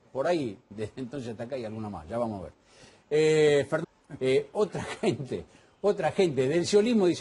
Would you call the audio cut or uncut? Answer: uncut